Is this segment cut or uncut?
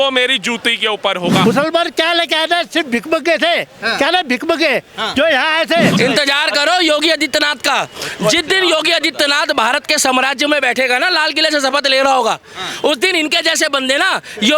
cut